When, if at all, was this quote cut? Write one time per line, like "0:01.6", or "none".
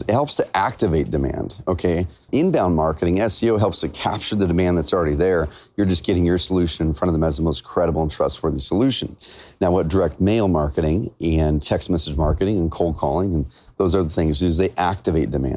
0:02.3